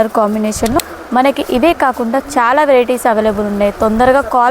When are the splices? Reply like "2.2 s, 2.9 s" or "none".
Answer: 0.9 s